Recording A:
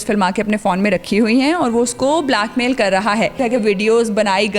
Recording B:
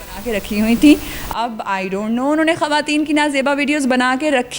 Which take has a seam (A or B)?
A